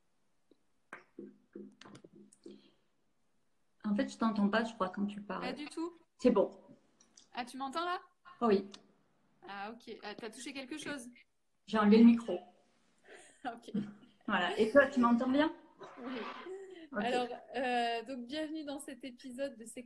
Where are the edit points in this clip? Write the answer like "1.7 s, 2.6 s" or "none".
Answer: 4.0 s